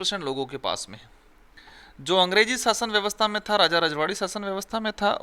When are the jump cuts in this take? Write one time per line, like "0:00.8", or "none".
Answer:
none